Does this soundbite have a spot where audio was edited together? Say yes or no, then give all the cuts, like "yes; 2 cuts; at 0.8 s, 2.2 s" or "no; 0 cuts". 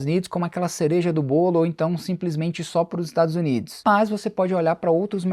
no; 0 cuts